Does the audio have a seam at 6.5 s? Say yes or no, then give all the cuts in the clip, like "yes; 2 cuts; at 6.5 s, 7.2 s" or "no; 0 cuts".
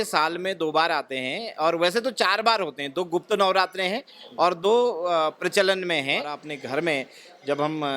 yes; 1 cut; at 6.5 s